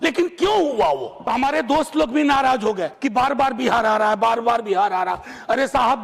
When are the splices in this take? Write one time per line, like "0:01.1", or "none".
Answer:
0:01.1
0:02.9